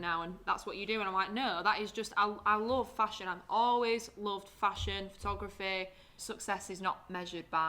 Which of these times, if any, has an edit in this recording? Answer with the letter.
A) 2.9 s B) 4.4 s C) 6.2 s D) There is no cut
C